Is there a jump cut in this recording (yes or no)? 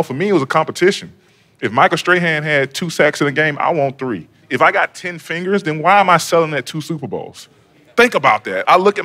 yes